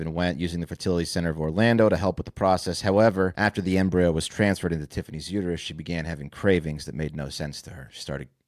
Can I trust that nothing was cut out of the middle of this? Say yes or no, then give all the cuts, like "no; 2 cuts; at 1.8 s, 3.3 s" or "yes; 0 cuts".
no; 1 cut; at 3.3 s